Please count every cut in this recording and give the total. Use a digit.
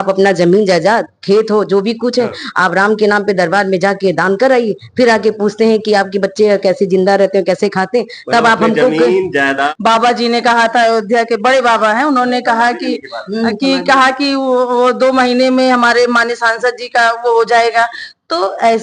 1